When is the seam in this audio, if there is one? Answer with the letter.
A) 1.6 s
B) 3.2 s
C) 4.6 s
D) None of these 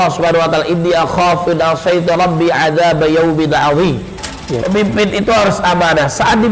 C